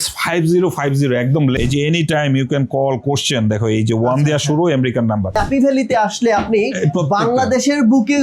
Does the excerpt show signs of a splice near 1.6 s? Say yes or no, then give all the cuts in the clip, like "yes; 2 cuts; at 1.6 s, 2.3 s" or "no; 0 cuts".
yes; 2 cuts; at 1.6 s, 5.4 s